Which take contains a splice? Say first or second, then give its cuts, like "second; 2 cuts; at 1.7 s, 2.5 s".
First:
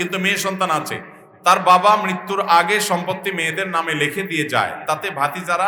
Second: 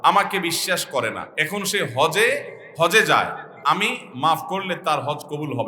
second; 3 cuts; at 1.3 s, 2.6 s, 3.5 s